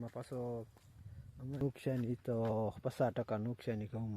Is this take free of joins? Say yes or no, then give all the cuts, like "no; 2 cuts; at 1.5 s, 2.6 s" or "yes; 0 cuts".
no; 1 cut; at 1.6 s